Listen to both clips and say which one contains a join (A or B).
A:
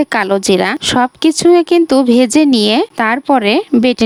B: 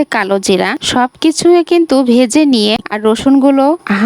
B